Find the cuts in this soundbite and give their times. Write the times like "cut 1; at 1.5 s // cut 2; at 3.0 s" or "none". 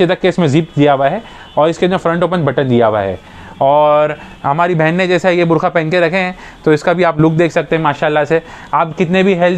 none